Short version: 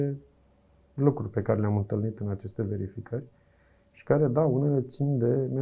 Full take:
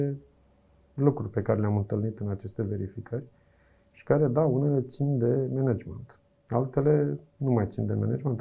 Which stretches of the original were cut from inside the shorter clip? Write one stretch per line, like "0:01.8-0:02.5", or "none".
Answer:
none

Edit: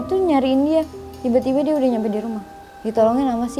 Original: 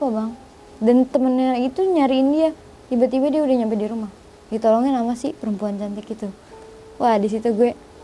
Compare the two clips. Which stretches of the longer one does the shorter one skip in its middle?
none

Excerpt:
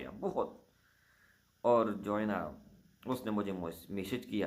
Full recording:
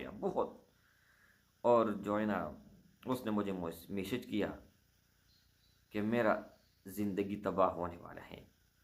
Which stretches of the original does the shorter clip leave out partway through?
none

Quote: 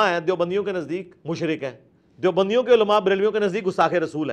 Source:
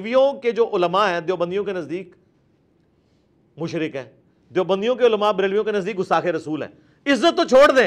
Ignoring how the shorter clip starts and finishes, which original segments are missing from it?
0:02.1-0:03.5

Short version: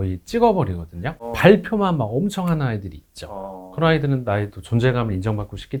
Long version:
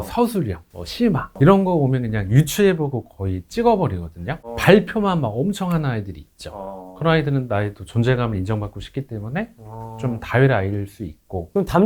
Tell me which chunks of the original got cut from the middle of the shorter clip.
none

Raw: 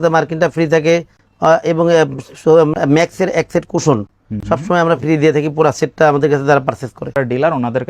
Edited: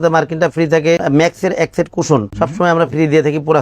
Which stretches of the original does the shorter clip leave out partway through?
0:01.0-0:02.8
0:04.1-0:04.4

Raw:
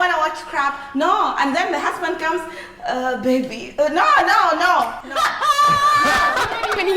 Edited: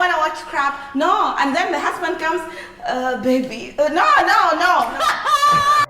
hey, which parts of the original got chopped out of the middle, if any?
0:05.0-0:05.1

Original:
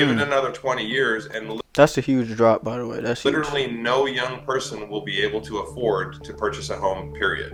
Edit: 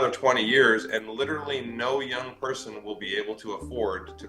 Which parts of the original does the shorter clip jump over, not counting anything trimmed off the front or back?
0:01.6-0:03.2

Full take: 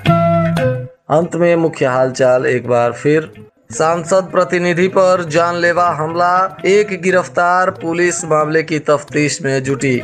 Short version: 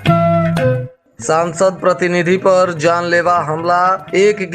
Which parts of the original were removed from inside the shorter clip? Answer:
0:00.9-0:03.4

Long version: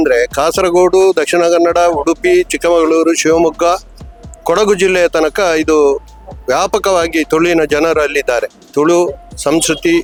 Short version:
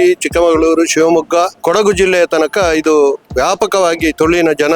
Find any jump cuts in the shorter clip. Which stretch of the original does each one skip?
0:03.8-0:04.4
0:06.1-0:06.4

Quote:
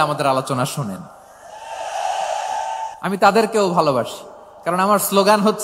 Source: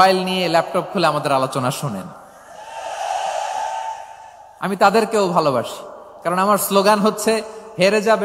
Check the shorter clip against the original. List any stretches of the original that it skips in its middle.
0:04.0-0:04.5

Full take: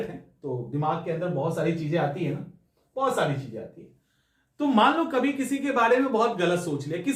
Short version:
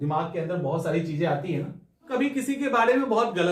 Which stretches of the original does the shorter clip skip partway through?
0:02.8-0:05.1

